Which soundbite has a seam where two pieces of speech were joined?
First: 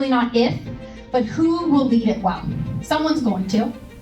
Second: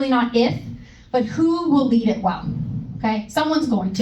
first; 1 cut; at 2.8 s

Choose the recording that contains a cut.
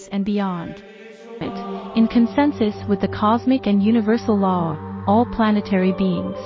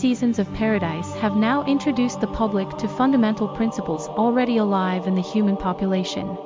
first; 1 cut; at 1.5 s

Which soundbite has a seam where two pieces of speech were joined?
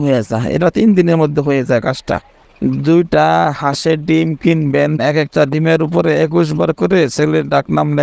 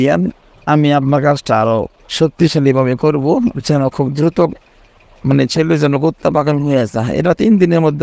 first; 2 cuts; at 2.4 s, 5.0 s

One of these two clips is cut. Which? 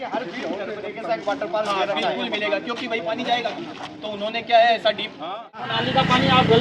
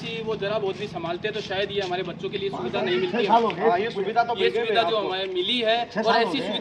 first; 1 cut; at 5.7 s

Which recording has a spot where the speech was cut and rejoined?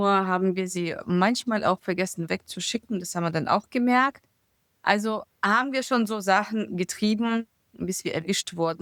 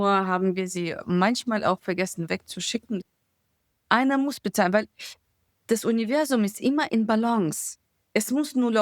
second; 1 cut; at 3.1 s

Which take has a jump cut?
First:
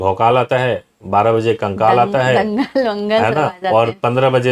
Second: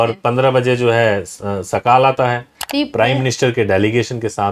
second; 1 cut; at 2.6 s

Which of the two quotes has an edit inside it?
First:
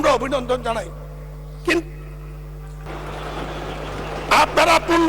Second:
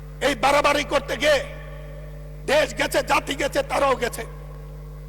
first; 1 cut; at 2.9 s

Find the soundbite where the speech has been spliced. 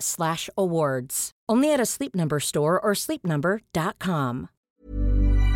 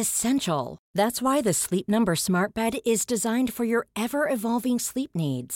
first; 1 cut; at 4.6 s

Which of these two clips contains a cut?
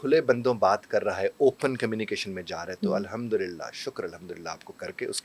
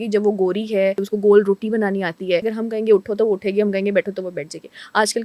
second; 2 cuts; at 1.0 s, 2.5 s

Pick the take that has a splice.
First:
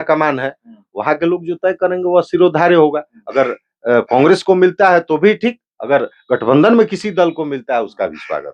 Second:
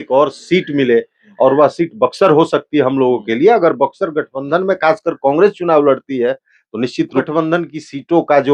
second; 1 cut; at 7.3 s

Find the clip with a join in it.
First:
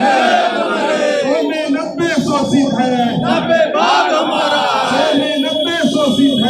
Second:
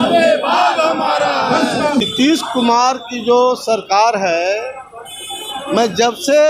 second; 1 cut; at 2.0 s

